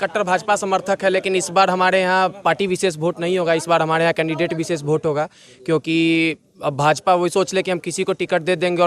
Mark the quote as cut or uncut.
uncut